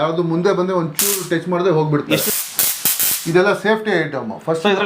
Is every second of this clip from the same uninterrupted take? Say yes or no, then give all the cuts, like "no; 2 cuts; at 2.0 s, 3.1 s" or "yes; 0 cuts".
no; 1 cut; at 2.2 s